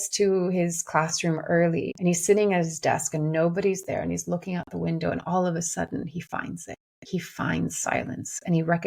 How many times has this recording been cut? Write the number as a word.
one